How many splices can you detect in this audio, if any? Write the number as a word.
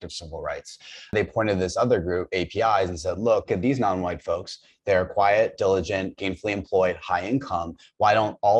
two